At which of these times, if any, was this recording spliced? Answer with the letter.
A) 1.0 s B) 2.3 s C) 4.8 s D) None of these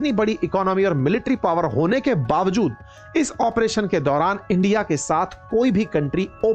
D